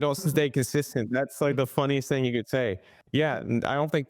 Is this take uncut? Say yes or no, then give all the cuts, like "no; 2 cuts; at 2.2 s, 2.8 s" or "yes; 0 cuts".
yes; 0 cuts